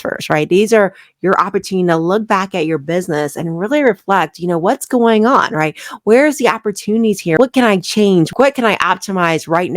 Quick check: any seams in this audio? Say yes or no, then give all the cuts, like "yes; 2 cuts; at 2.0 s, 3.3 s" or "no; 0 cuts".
yes; 2 cuts; at 7.4 s, 8.3 s